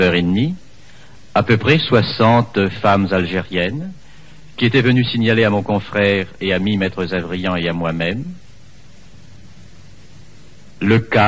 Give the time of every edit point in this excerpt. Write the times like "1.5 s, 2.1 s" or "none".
none